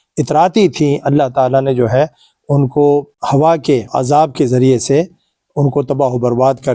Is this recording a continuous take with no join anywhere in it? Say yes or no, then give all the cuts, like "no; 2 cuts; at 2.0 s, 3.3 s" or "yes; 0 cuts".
yes; 0 cuts